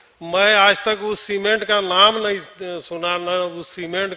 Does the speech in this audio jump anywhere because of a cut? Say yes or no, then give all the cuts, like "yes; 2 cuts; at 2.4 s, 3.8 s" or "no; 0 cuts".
no; 0 cuts